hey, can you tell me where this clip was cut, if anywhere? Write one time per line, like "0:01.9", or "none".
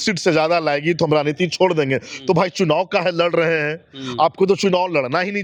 none